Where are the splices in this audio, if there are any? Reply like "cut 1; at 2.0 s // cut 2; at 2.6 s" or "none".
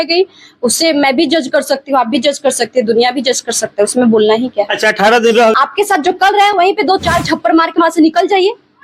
cut 1; at 5.5 s